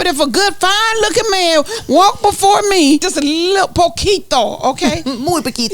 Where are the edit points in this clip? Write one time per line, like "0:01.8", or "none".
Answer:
0:03.1